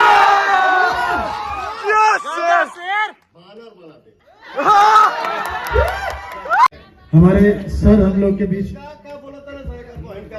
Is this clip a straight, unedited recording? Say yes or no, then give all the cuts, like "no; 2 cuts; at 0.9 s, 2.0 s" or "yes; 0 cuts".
no; 1 cut; at 6.7 s